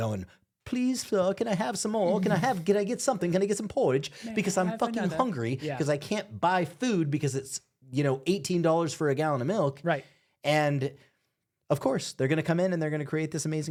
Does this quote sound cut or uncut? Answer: uncut